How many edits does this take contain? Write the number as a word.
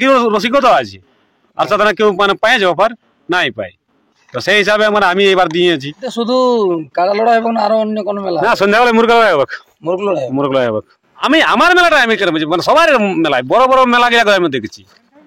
two